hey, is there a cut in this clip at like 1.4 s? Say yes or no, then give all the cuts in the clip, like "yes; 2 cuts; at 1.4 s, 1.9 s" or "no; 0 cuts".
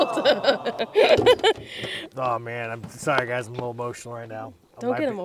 no; 0 cuts